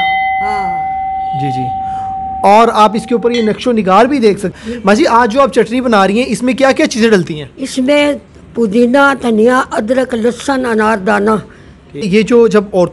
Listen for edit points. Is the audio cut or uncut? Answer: cut